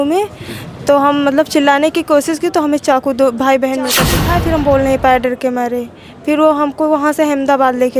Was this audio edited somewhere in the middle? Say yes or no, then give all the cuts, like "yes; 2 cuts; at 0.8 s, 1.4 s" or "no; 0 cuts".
yes; 1 cut; at 4.1 s